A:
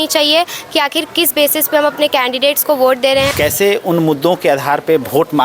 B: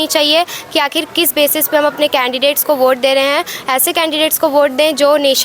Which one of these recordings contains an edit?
A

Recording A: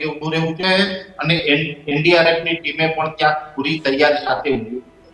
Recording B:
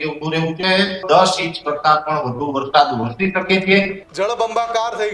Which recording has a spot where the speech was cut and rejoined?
B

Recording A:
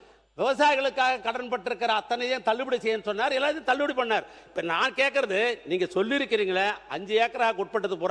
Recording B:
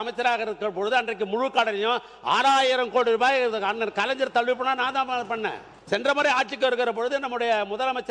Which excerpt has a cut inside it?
B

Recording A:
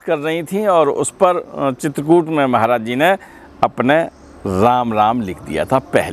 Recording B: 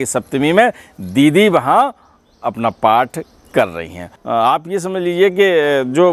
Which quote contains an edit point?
B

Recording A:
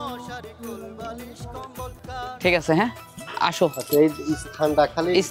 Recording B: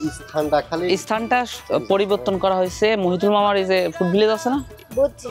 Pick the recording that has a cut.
A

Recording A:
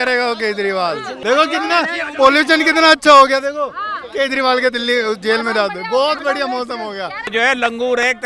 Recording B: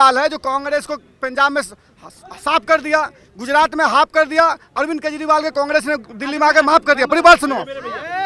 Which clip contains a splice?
A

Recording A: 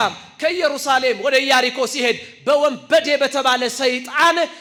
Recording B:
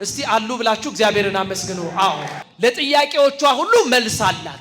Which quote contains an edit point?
B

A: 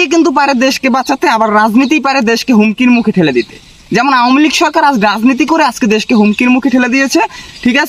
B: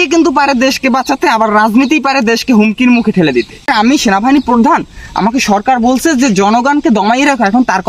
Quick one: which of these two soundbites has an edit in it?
B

